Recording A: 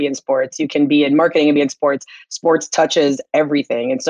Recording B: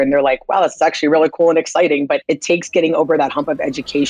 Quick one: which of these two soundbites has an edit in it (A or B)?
B